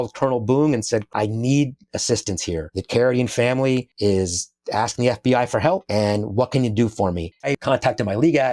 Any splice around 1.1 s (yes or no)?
yes